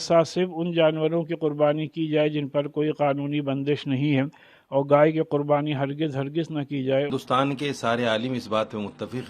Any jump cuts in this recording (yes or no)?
yes